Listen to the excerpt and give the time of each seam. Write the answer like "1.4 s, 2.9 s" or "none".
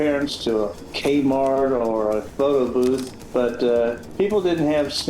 3.2 s

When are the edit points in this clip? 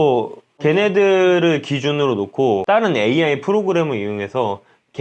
2.6 s

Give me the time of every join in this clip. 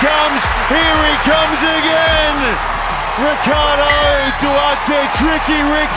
none

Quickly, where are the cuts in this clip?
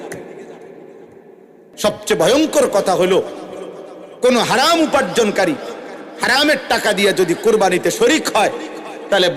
1.6 s

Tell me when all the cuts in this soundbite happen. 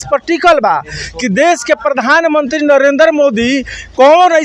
none

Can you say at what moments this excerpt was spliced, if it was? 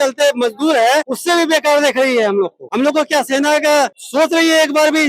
1.1 s, 2.6 s, 4.0 s

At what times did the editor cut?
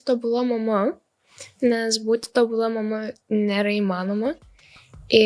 none

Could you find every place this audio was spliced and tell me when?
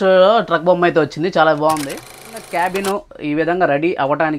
2.4 s

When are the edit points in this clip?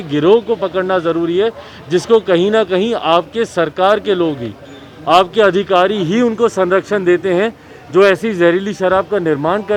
none

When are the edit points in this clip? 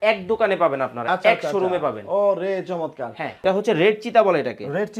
3.4 s

